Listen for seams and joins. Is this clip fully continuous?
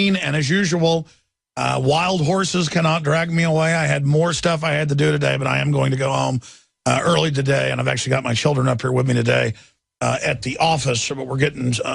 no; 1 cut; at 4.2 s

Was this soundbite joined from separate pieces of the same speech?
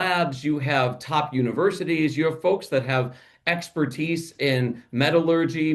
no; 0 cuts

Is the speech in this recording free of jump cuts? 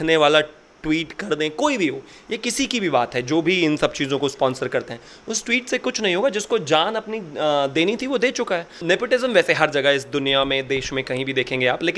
no; 1 cut; at 8.8 s

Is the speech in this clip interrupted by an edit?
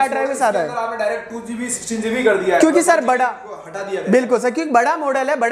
no; 0 cuts

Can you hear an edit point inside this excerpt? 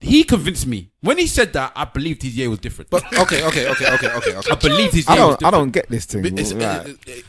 no; 0 cuts

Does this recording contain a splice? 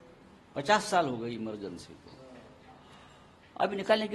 no; 0 cuts

